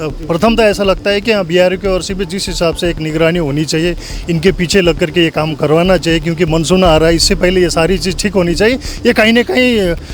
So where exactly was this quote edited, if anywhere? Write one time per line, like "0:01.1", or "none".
none